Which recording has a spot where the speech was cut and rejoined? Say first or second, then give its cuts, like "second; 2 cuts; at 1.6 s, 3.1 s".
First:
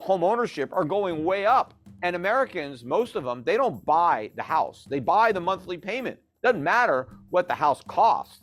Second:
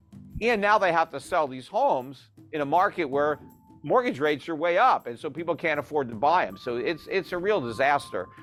first; 1 cut; at 1.8 s